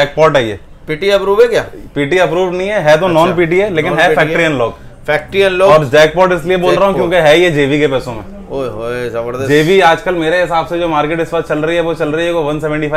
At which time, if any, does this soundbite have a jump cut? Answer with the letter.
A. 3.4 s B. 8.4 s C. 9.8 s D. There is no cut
D